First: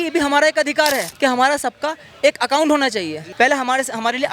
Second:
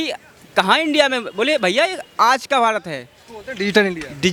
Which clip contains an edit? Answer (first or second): first